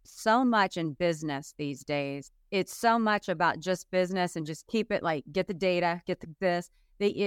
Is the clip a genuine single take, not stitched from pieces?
no; 1 cut; at 2.3 s

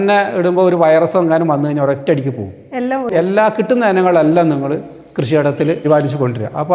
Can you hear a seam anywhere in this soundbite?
yes; 2 cuts; at 3.1 s, 5.8 s

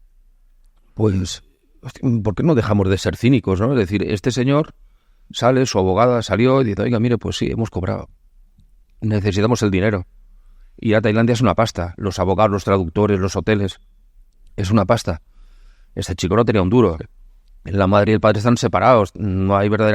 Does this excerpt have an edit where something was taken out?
no; 0 cuts

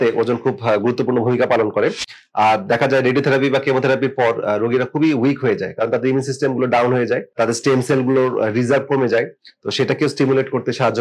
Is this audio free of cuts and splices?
no; 1 cut; at 7.4 s

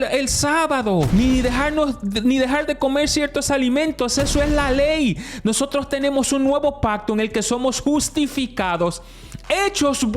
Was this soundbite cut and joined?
yes; 1 cut; at 1.1 s

